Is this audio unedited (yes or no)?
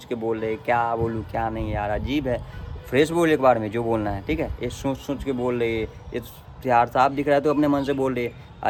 yes